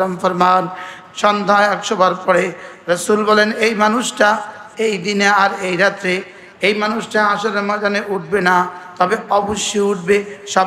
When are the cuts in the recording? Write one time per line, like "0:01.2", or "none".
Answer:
0:01.0